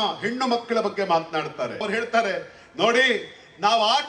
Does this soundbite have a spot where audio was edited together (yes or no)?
yes